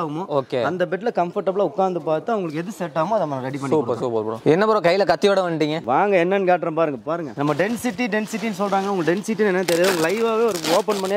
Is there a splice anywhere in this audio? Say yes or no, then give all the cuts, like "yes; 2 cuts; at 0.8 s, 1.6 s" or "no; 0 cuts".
no; 0 cuts